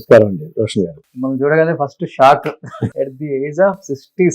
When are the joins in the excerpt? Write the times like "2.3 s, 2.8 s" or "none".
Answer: 1.1 s, 2.9 s